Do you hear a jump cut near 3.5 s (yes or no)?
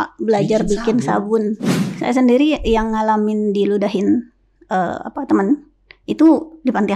no